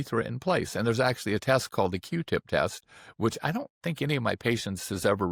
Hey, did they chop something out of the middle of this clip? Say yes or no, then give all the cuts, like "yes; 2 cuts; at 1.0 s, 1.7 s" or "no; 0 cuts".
no; 0 cuts